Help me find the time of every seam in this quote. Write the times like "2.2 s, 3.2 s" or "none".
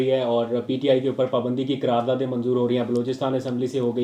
none